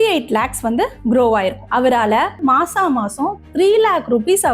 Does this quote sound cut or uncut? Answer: cut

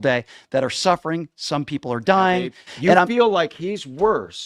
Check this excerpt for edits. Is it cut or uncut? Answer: cut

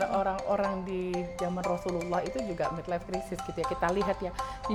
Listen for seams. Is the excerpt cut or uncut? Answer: uncut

